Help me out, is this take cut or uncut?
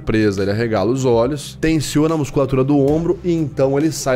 cut